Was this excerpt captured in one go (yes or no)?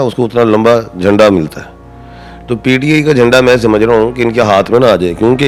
yes